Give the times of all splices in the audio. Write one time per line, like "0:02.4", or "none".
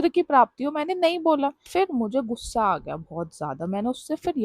0:01.7